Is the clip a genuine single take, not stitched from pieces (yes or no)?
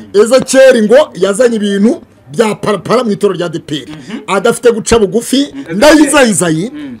no